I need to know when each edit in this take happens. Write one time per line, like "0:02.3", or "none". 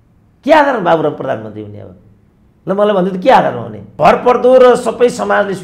0:03.9